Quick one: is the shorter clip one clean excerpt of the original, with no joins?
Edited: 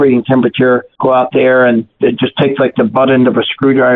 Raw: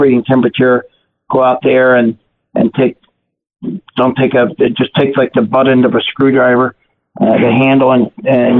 no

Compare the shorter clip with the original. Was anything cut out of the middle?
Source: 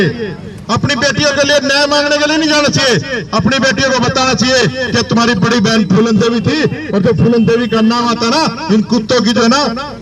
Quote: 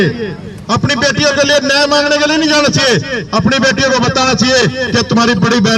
no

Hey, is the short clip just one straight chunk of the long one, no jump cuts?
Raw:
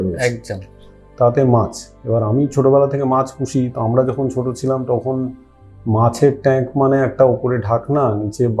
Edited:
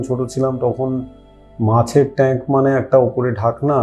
yes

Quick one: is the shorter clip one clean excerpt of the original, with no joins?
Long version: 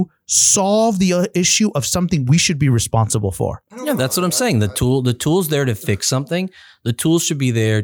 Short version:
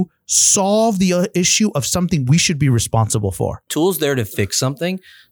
no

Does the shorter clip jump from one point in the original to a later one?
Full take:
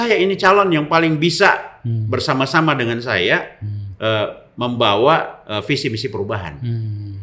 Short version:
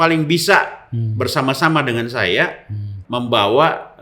yes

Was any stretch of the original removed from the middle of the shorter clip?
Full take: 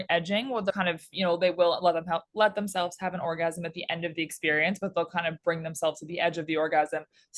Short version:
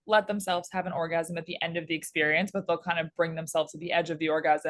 no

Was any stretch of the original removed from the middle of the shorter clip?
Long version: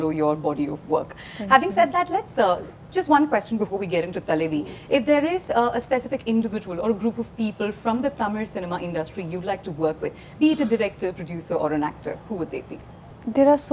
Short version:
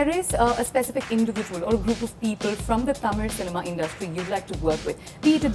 no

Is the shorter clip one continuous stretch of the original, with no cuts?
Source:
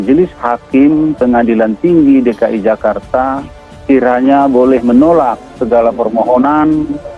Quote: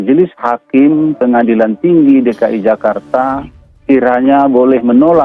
yes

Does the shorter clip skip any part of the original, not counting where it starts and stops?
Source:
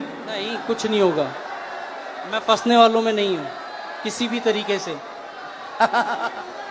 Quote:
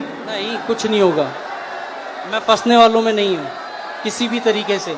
no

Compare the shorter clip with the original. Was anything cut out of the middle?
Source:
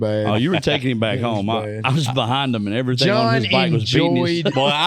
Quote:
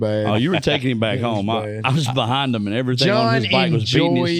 no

